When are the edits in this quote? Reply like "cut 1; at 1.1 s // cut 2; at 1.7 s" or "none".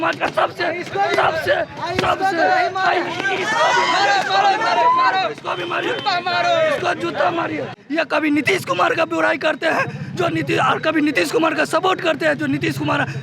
cut 1; at 7.7 s